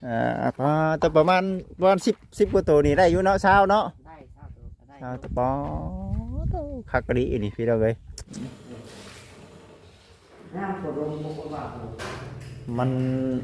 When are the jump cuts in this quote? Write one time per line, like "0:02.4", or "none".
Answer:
0:08.3